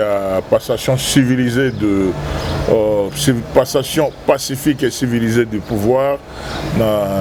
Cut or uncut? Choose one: uncut